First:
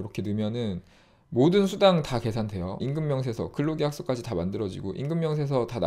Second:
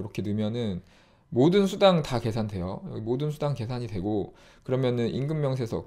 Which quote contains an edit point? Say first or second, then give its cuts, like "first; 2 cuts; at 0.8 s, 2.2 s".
first; 1 cut; at 2.8 s